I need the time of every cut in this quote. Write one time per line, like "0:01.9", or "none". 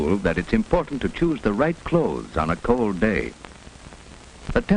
0:01.6